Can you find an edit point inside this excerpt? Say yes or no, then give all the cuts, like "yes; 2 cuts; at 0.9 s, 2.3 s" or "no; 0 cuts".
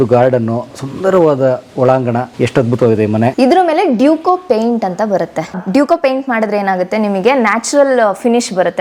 yes; 3 cuts; at 2.3 s, 3.3 s, 5.5 s